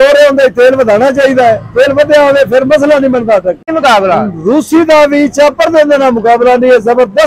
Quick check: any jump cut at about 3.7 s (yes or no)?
yes